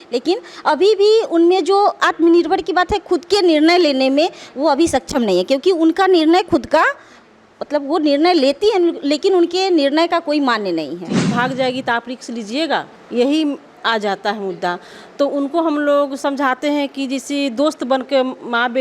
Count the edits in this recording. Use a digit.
1